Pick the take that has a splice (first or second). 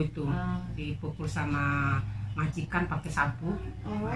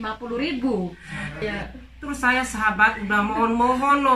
second